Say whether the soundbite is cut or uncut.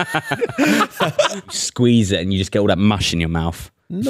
cut